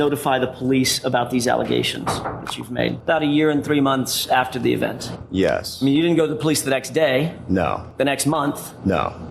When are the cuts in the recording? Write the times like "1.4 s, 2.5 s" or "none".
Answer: 3.0 s, 7.9 s